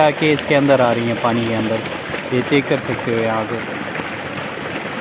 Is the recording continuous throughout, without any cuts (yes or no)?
yes